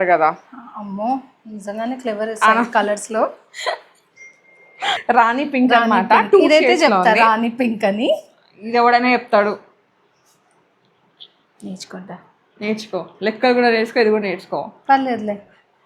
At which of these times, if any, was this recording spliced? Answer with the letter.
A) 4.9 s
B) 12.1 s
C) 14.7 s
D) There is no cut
A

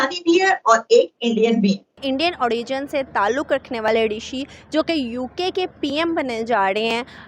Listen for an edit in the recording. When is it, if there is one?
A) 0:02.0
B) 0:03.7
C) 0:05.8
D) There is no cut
A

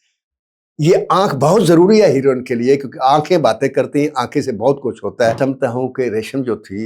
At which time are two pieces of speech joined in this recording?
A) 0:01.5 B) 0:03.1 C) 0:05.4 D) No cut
C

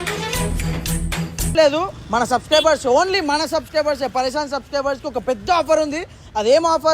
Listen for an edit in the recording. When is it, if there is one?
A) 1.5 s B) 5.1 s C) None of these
A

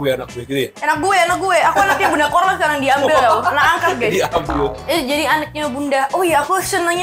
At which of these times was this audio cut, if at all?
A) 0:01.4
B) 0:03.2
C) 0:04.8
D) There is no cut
C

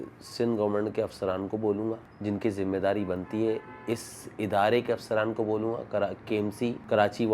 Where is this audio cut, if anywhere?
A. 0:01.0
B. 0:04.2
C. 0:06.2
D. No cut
D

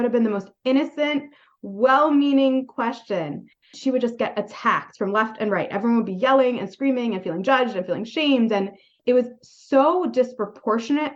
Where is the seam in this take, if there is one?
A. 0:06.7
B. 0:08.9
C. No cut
B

